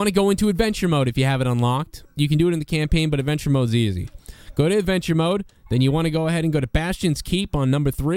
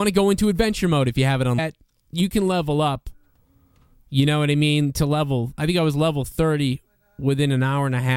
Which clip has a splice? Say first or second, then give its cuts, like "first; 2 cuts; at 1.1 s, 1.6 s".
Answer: first; 1 cut; at 1.6 s